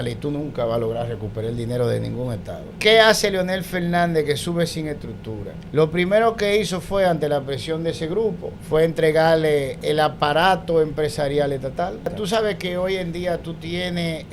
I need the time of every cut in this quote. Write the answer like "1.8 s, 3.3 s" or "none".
2.7 s, 5.6 s, 8.5 s, 9.8 s, 12.1 s